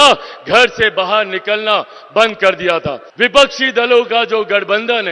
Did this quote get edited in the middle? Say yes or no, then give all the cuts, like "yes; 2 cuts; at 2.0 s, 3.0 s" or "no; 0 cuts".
yes; 1 cut; at 3.0 s